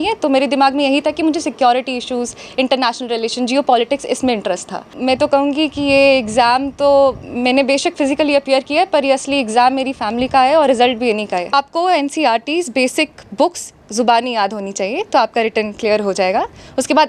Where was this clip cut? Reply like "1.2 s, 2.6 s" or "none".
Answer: 4.9 s, 11.5 s